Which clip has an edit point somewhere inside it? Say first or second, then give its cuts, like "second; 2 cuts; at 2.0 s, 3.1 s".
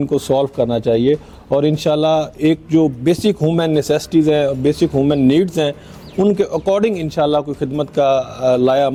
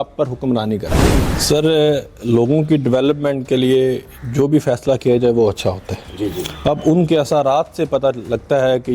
second; 1 cut; at 1.0 s